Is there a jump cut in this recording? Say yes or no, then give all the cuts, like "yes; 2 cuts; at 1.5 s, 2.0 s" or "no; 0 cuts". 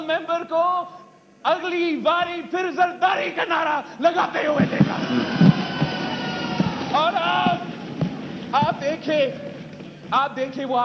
no; 0 cuts